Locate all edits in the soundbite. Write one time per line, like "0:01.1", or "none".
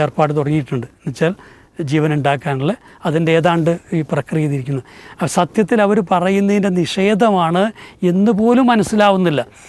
none